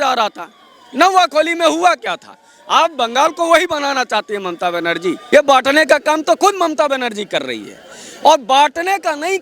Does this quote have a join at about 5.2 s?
yes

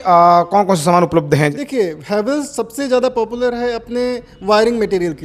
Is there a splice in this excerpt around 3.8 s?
no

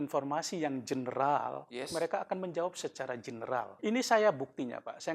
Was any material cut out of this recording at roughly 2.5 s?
no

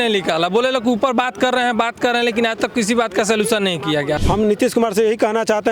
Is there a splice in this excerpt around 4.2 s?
yes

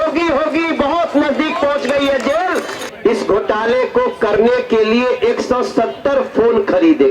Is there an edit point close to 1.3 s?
no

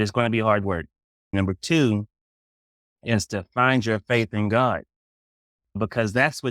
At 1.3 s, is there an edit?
yes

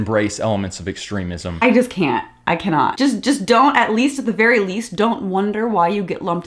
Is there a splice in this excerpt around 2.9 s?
yes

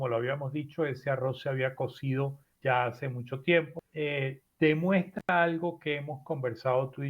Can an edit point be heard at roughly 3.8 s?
yes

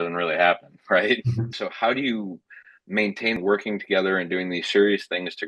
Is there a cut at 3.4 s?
yes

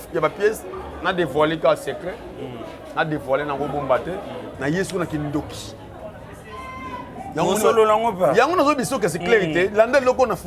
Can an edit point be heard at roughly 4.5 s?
yes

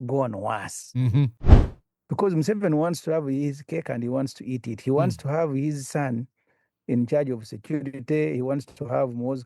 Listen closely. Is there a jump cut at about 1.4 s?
yes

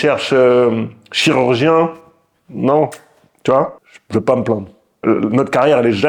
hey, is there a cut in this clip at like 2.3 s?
no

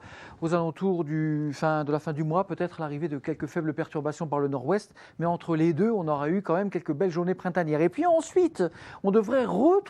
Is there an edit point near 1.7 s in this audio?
yes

